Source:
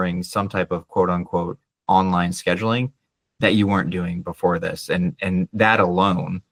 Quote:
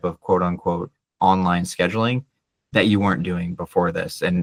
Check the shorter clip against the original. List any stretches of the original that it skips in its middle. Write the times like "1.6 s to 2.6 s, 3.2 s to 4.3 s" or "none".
none